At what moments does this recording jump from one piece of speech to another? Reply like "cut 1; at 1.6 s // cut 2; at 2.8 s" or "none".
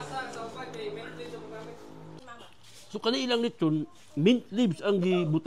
cut 1; at 2.2 s